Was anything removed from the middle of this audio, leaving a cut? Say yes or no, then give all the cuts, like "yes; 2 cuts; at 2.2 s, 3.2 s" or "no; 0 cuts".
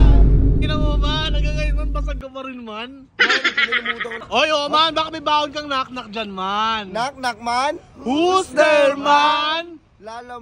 yes; 1 cut; at 4.2 s